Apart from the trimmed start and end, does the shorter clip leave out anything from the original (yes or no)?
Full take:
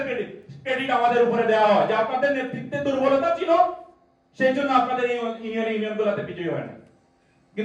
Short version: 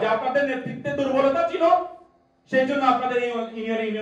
no